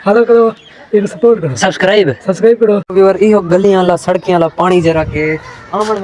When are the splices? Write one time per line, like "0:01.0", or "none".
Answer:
0:02.9